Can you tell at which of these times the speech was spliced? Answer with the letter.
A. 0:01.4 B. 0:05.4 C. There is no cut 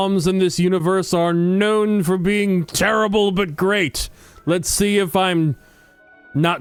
C